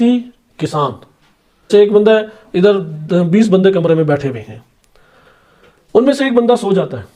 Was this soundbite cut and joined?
yes; 1 cut; at 1.7 s

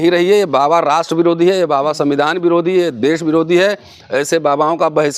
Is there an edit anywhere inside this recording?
no; 0 cuts

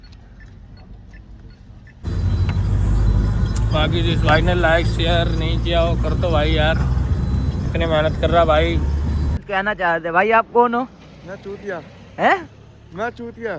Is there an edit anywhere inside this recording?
yes; 2 cuts; at 1.9 s, 9.4 s

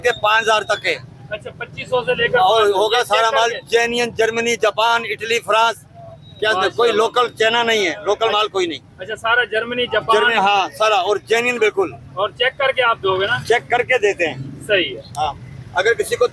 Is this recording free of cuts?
yes; 0 cuts

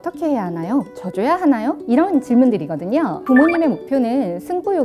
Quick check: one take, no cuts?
no; 3 cuts; at 1.0 s, 1.8 s, 3.2 s

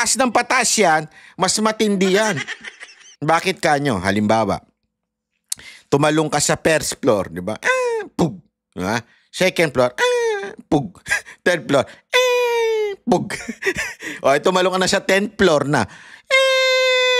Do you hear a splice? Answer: no; 0 cuts

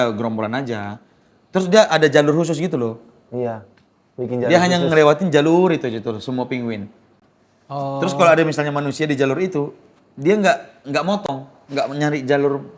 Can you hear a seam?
no; 0 cuts

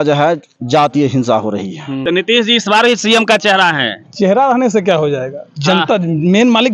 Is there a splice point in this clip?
yes; 1 cut; at 1.9 s

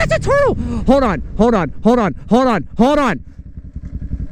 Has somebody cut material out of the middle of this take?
no; 0 cuts

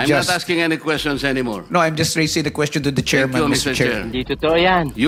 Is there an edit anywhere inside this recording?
no; 0 cuts

